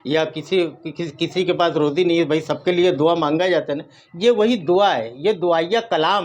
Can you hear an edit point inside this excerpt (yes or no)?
no